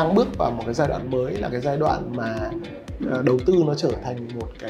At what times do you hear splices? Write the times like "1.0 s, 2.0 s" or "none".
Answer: none